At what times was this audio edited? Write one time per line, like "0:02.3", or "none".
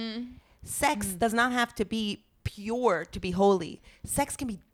none